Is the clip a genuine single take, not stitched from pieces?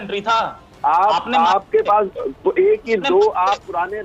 yes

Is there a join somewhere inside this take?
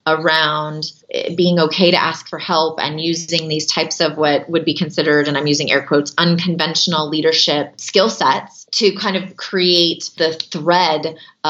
yes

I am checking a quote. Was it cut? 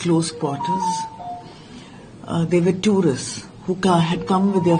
no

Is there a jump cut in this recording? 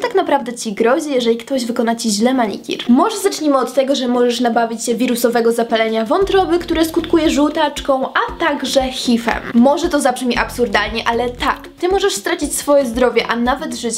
no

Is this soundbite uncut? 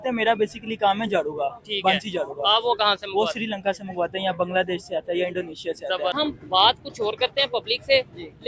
no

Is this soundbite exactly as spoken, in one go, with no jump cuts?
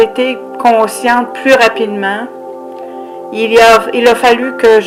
yes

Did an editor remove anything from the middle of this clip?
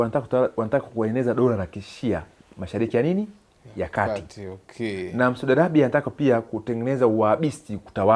no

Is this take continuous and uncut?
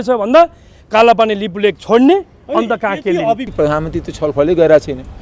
no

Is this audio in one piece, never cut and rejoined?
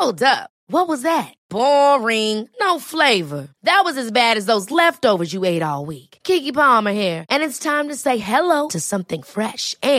yes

